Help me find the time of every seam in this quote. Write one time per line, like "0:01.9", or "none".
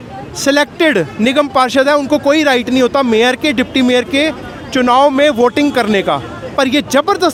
none